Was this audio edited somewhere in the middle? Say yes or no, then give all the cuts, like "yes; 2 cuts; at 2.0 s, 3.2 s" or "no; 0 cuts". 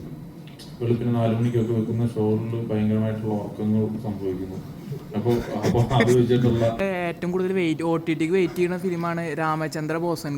yes; 1 cut; at 6.8 s